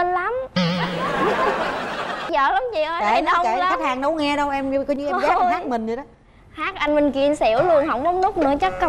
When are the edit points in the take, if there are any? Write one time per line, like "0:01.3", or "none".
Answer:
0:02.2